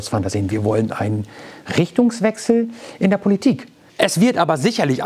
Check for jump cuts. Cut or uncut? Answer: cut